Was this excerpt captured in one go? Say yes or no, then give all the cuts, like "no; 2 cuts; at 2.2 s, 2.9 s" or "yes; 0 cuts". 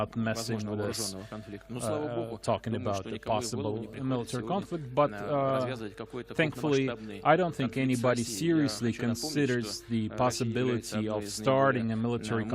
no; 1 cut; at 9.2 s